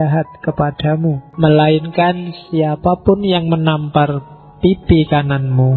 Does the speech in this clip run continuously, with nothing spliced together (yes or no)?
no